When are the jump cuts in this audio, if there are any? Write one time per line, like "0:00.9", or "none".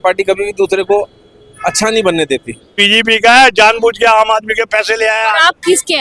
0:02.8